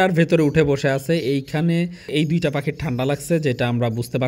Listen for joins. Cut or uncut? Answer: cut